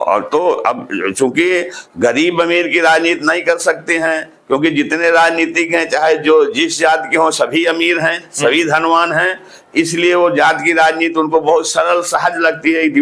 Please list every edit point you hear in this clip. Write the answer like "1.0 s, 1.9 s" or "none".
none